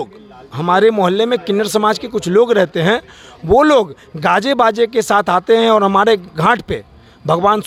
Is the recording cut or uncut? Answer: uncut